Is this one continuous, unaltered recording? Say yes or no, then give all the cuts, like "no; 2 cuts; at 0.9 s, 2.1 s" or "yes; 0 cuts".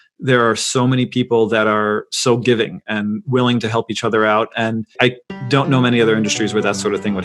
no; 1 cut; at 4.9 s